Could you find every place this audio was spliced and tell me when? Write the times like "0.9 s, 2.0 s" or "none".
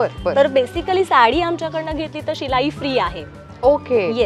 none